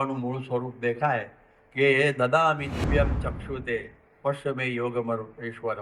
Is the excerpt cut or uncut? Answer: cut